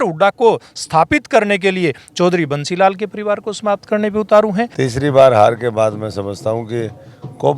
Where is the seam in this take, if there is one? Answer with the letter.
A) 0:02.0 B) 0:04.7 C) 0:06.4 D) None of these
B